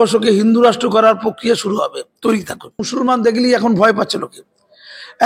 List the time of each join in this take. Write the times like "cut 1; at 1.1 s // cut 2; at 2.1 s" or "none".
cut 1; at 2.9 s